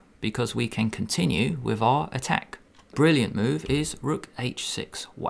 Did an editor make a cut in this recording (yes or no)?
yes